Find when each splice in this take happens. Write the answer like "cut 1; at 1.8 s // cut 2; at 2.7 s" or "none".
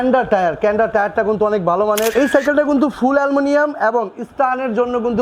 cut 1; at 2.1 s

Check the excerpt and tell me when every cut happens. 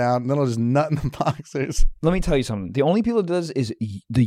cut 1; at 1.8 s

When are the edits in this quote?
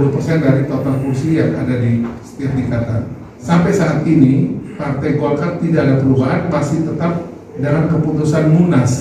cut 1; at 3.4 s

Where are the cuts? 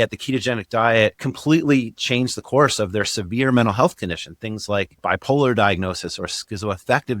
cut 1; at 1.2 s // cut 2; at 5.0 s

